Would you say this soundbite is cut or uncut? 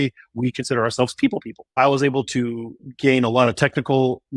cut